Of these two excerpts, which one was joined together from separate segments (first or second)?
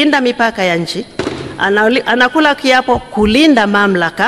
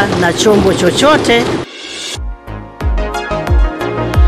second